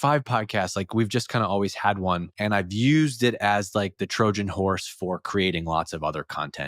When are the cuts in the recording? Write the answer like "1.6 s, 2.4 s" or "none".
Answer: 2.3 s

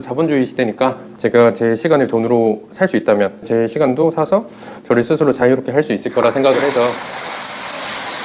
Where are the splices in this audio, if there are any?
1.1 s, 3.4 s

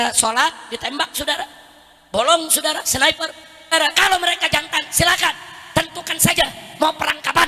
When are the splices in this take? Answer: 3.7 s

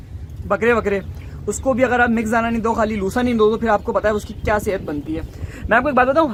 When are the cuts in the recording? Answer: none

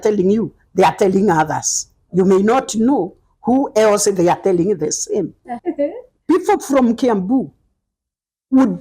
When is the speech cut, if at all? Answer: 5.6 s

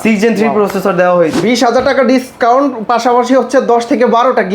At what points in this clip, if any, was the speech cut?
1.4 s

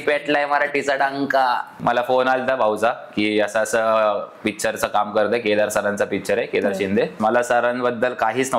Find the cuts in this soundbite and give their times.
1.7 s, 7.1 s

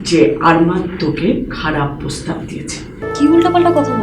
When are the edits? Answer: 3.0 s

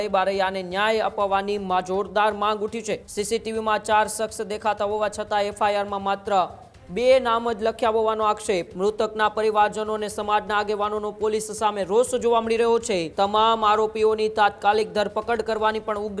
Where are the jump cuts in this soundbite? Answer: 3.1 s, 8.7 s, 13.1 s

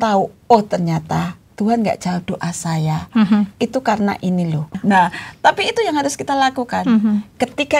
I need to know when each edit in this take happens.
4.7 s

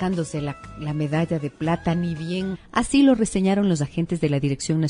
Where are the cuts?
none

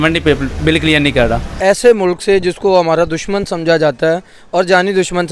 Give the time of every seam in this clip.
1.5 s

